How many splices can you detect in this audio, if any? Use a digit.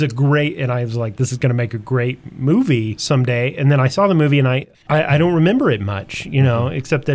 2